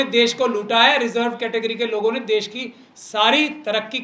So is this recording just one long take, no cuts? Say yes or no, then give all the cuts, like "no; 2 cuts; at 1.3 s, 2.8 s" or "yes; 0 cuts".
yes; 0 cuts